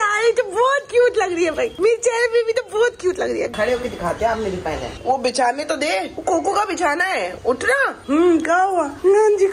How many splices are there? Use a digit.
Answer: 2